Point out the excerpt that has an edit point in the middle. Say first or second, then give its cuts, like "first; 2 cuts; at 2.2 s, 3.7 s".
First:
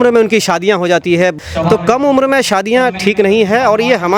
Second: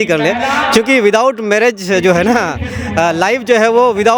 first; 1 cut; at 1.3 s